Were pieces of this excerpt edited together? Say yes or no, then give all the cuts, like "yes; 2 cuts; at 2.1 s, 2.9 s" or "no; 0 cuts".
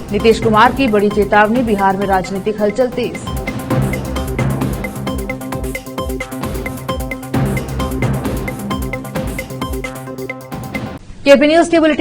no; 0 cuts